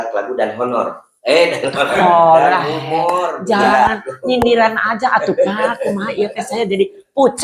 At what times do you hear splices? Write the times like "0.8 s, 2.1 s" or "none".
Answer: none